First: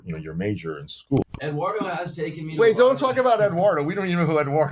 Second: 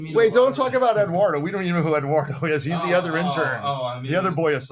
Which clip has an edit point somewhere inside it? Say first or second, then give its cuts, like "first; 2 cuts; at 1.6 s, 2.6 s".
first; 1 cut; at 1.2 s